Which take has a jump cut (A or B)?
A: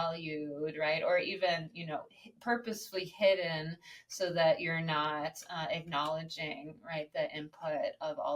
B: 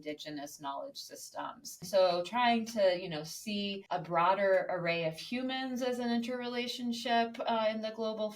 B